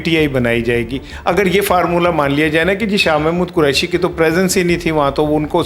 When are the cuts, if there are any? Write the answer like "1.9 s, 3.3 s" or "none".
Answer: none

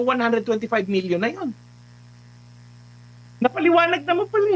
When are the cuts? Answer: none

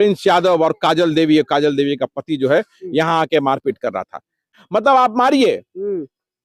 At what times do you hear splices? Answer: 4.5 s

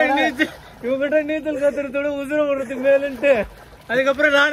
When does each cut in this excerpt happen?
none

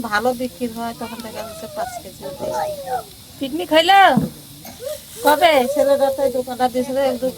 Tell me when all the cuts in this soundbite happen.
none

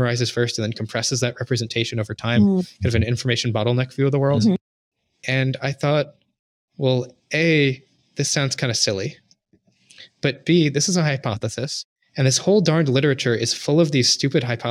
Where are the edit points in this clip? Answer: none

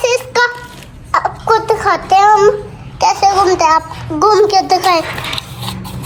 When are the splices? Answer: none

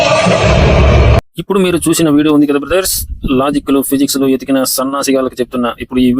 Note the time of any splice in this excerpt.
1.2 s

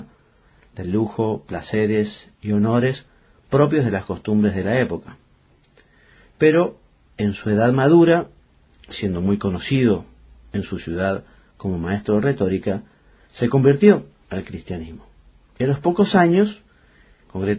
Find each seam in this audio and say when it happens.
4.6 s

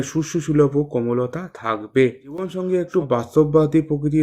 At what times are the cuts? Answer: 2.5 s

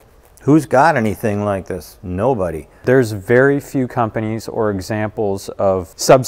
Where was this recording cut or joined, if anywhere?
2.7 s

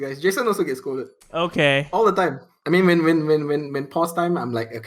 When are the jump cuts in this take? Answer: 2.5 s

